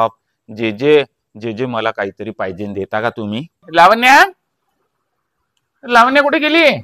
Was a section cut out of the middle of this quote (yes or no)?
yes